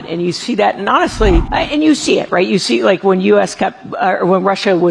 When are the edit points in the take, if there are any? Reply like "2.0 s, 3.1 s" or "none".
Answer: 1.5 s

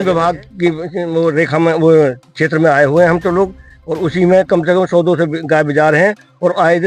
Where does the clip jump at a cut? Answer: none

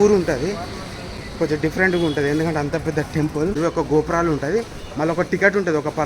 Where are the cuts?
3.6 s

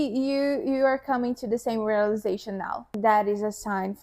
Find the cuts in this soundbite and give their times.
3.0 s

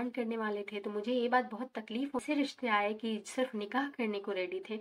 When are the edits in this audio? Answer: 2.2 s

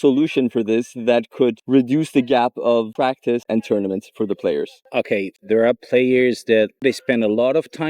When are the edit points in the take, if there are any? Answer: 1.6 s, 3.2 s, 5.4 s, 6.8 s

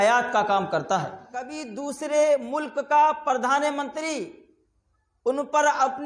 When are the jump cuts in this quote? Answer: 1.6 s

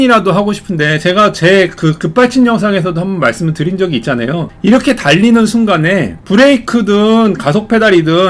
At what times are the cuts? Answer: 4.5 s, 6.2 s

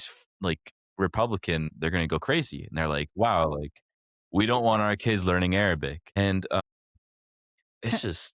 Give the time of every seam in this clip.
none

